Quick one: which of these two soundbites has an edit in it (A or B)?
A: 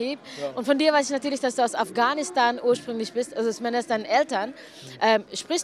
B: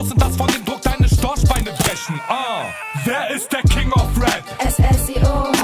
A